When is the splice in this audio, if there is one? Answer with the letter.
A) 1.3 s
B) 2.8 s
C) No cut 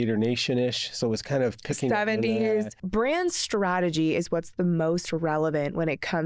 B